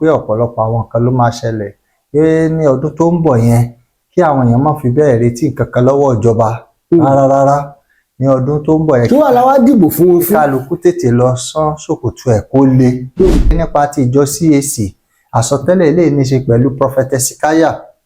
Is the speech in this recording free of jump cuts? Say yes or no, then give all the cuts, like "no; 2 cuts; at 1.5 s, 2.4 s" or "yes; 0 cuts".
no; 1 cut; at 13.6 s